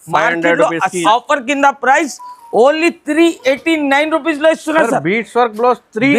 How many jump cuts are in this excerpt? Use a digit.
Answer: 1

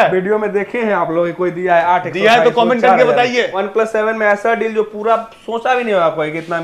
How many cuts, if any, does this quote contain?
1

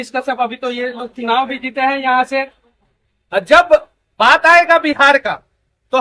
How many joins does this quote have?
0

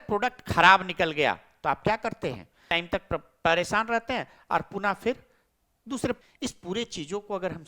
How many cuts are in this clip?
2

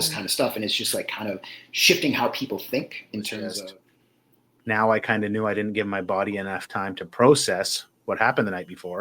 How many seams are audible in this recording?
1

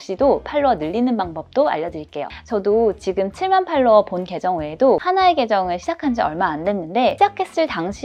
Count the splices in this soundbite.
3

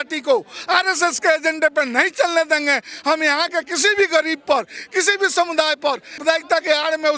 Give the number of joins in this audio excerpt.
1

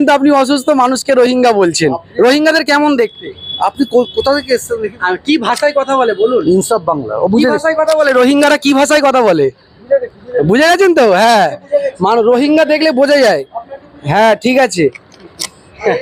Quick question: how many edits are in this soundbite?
0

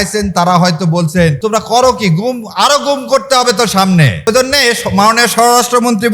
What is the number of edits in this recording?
2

